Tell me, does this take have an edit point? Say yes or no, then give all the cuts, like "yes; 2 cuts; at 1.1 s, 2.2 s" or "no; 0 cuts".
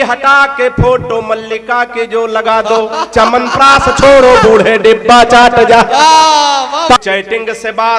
yes; 1 cut; at 7.0 s